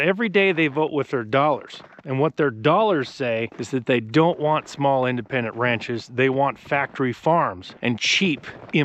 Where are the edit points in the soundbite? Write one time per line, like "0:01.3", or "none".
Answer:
0:03.5
0:07.7